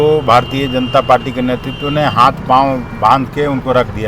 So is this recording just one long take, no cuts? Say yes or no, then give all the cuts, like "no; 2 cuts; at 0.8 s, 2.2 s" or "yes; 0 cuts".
yes; 0 cuts